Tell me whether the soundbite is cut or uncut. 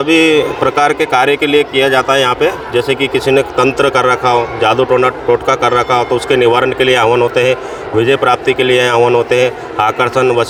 uncut